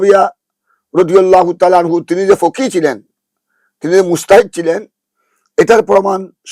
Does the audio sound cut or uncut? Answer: uncut